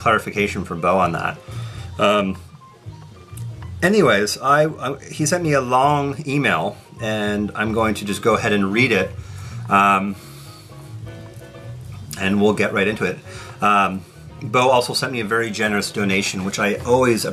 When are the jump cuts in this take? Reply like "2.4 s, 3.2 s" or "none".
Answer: none

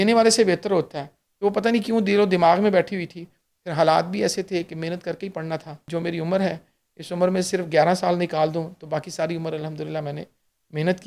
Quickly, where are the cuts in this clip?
5.8 s

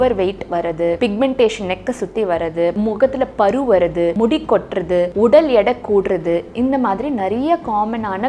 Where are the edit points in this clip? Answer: 1.0 s, 2.7 s, 4.1 s, 5.1 s

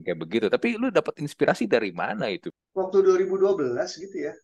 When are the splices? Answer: 2.5 s

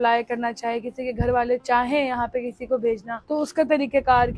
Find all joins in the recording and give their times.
3.1 s

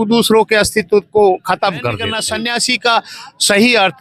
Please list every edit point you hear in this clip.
2.1 s

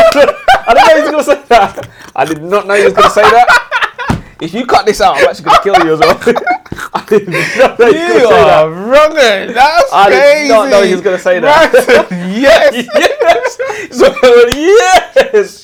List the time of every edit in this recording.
none

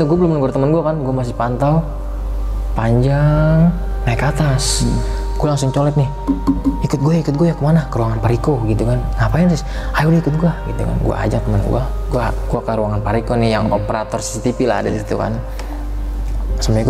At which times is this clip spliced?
none

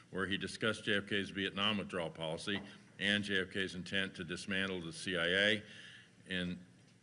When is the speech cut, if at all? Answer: 1.5 s

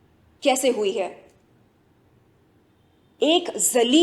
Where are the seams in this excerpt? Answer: none

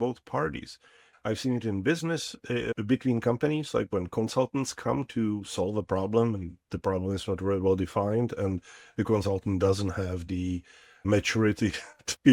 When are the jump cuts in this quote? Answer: 1.0 s, 2.7 s, 11.0 s

